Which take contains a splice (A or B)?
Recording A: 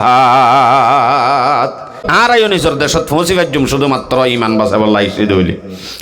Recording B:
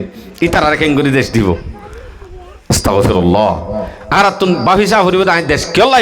A